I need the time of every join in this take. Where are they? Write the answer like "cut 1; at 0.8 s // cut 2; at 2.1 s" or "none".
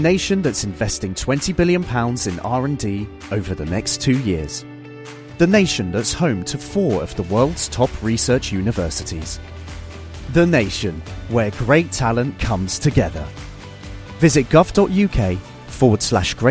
none